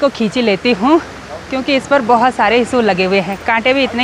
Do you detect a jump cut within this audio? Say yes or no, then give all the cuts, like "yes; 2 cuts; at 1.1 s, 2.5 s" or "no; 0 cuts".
no; 0 cuts